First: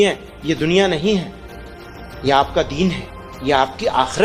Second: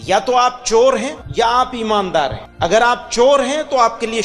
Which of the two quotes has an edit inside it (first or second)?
second